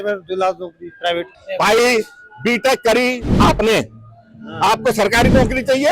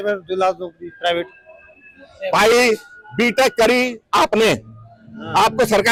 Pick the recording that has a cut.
first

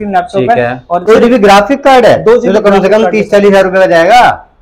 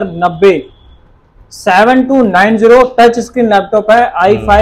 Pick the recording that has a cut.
first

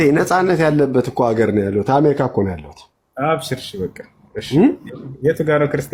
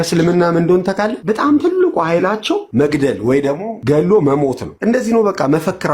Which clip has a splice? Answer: second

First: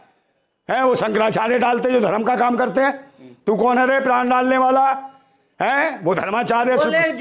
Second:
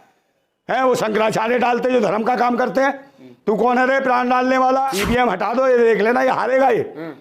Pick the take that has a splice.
second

